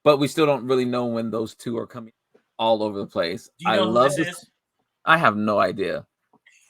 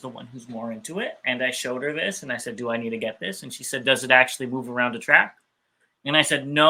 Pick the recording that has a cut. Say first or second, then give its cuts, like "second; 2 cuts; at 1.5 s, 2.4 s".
first; 1 cut; at 1.9 s